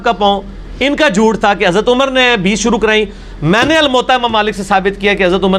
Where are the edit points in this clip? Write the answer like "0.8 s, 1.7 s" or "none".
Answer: none